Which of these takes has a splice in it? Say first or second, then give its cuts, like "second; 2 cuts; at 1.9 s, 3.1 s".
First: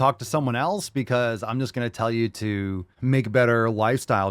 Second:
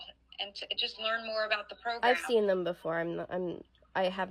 first; 1 cut; at 2.9 s